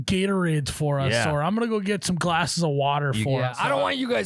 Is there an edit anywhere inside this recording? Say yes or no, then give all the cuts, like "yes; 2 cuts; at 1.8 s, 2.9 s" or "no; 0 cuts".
no; 0 cuts